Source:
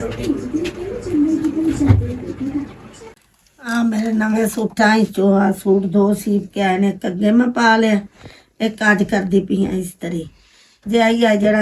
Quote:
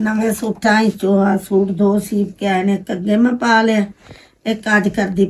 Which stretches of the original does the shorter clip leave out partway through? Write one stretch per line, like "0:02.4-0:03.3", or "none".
none